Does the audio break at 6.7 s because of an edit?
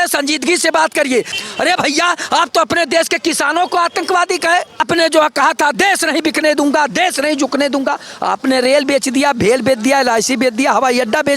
no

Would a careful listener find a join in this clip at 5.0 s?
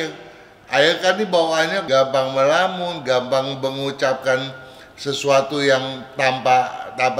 no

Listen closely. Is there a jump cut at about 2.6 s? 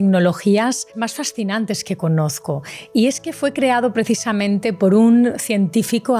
no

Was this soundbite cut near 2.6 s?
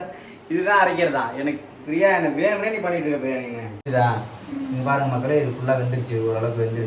no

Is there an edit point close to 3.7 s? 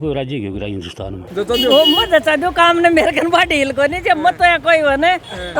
no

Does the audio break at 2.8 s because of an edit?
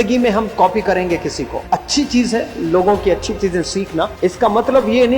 no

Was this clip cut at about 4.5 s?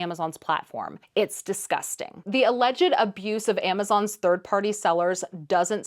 no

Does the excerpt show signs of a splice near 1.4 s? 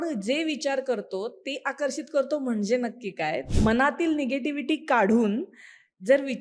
no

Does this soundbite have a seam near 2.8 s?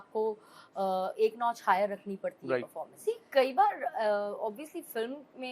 yes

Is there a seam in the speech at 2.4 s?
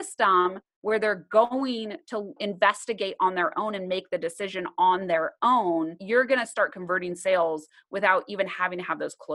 yes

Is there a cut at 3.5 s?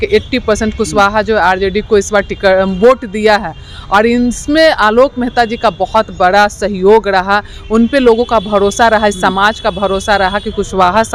no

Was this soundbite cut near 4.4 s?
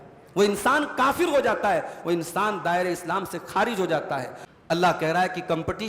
yes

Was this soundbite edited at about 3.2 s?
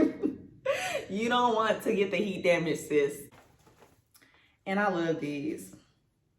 yes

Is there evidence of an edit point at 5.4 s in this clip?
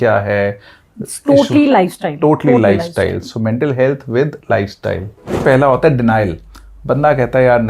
yes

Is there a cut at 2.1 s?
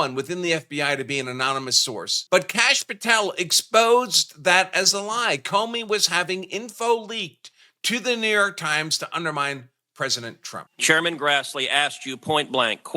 yes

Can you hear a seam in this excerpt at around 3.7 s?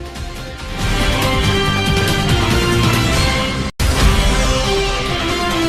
yes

